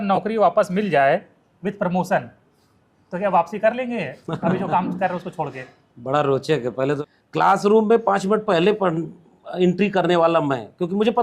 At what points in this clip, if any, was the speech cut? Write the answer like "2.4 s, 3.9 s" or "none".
7.1 s